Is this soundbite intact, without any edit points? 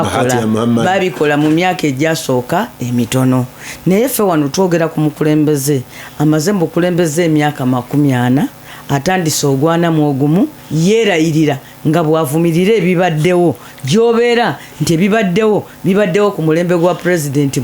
yes; 0 cuts

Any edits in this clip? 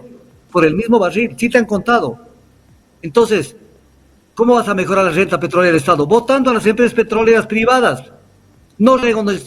no; 0 cuts

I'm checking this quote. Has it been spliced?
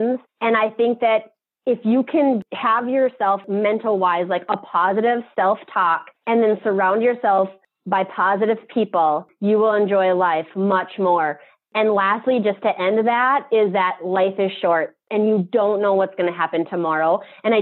yes; 1 cut; at 3.4 s

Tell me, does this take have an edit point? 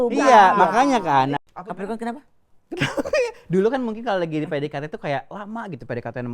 yes; 1 cut; at 1.4 s

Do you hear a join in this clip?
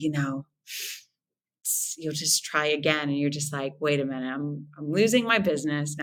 no; 0 cuts

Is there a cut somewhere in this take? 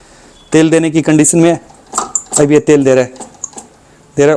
no; 0 cuts

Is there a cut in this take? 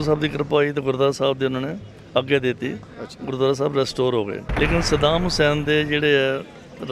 yes; 1 cut; at 4.4 s

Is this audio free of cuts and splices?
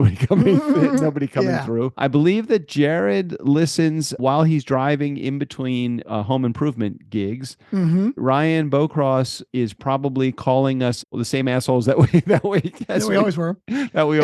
no; 6 cuts; at 1.9 s, 4.1 s, 6.0 s, 8.2 s, 9.4 s, 11.2 s

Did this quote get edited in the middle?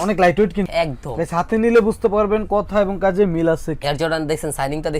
yes; 1 cut; at 3.7 s

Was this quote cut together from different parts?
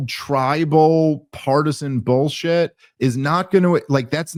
no; 0 cuts

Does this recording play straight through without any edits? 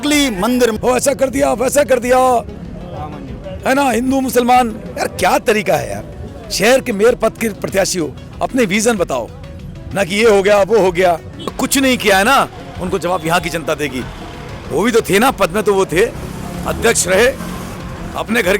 no; 3 cuts; at 0.7 s, 11.6 s, 14.1 s

